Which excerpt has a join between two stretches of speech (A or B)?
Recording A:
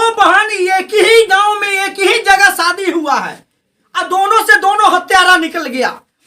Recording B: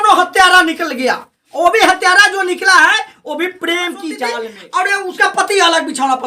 B